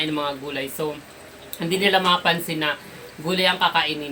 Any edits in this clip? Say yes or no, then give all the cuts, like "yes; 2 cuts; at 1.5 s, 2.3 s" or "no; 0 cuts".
no; 0 cuts